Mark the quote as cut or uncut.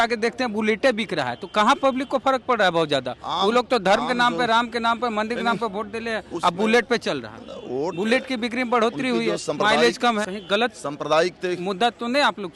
cut